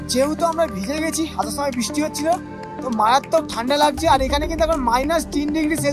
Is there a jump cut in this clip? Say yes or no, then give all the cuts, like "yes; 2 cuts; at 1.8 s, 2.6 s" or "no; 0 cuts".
no; 0 cuts